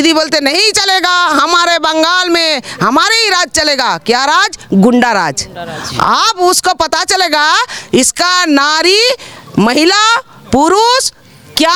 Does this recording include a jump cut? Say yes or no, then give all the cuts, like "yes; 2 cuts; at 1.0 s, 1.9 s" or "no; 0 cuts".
no; 0 cuts